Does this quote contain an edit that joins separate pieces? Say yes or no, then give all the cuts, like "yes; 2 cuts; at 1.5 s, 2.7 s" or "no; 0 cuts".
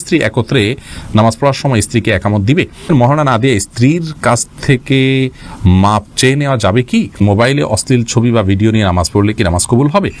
yes; 2 cuts; at 2.9 s, 7.2 s